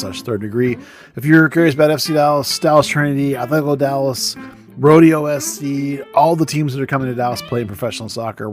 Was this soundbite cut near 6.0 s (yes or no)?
no